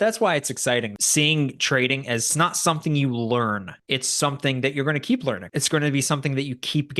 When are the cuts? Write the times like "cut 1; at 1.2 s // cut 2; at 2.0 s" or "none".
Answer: cut 1; at 1.0 s // cut 2; at 2.3 s // cut 3; at 3.7 s // cut 4; at 5.5 s